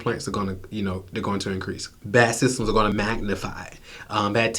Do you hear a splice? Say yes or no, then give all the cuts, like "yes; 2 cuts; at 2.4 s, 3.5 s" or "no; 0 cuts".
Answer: yes; 2 cuts; at 1.9 s, 2.9 s